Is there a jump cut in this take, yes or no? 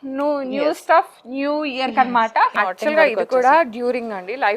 yes